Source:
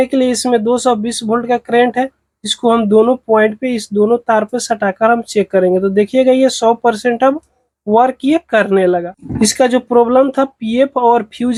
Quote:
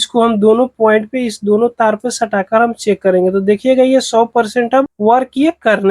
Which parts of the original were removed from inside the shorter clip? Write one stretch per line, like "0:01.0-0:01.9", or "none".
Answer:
0:07.4-0:07.8